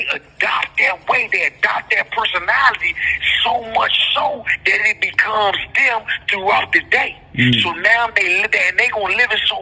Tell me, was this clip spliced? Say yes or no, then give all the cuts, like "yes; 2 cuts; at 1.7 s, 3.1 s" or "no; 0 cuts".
no; 0 cuts